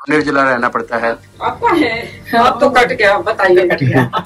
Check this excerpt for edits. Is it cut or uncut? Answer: cut